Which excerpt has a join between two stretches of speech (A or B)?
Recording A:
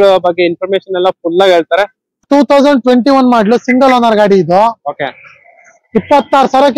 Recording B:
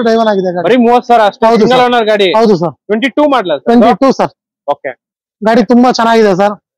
A